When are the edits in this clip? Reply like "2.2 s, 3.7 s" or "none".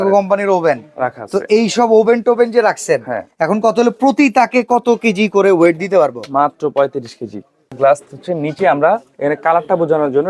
7.7 s